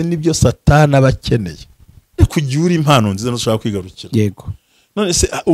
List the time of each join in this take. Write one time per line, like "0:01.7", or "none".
0:02.2